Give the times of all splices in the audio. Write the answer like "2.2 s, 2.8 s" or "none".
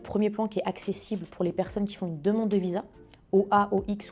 none